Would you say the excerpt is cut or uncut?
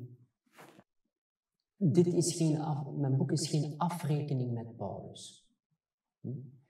cut